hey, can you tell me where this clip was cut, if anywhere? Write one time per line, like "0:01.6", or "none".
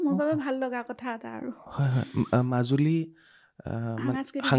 none

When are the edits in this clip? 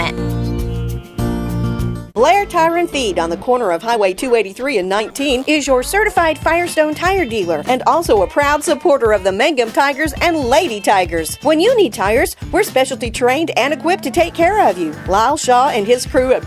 0:02.0

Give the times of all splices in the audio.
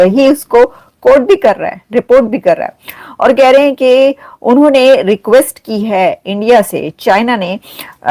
none

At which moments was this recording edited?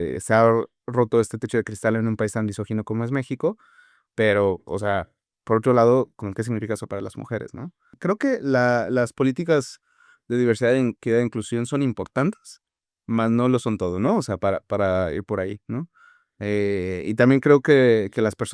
0:07.9

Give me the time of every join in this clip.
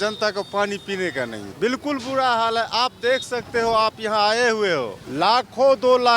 0:01.4
0:05.0

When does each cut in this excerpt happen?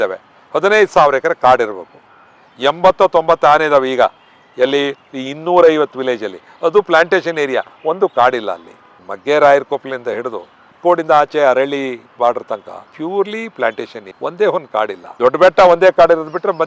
none

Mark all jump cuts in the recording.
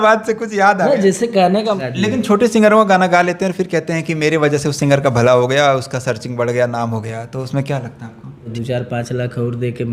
0:01.8
0:08.5

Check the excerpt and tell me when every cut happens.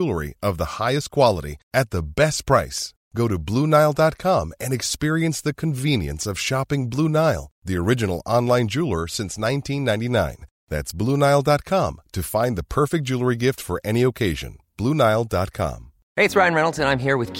none

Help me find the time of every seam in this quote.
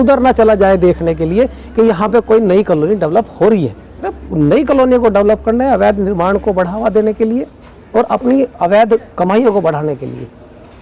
0:04.2

